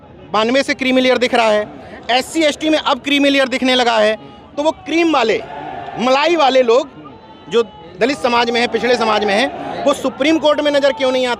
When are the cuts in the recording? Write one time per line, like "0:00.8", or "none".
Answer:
none